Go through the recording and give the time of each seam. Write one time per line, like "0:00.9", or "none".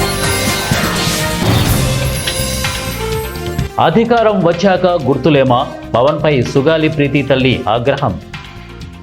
0:01.0
0:02.3
0:03.7